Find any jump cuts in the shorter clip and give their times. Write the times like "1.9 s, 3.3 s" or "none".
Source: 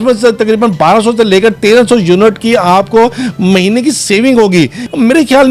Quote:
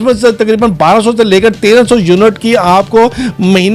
none